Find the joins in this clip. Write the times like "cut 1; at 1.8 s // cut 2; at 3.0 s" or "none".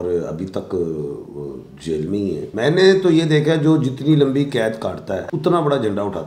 cut 1; at 2.5 s // cut 2; at 5.3 s